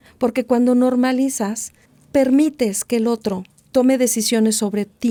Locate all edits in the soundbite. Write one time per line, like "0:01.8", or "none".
none